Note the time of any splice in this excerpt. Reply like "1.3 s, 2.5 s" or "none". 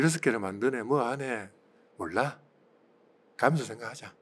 none